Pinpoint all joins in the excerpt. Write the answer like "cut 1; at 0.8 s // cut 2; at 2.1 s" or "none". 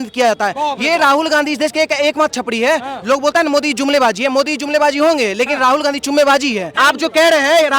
cut 1; at 6.7 s